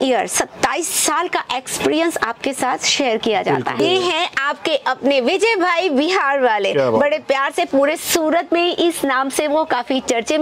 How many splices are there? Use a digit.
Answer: 1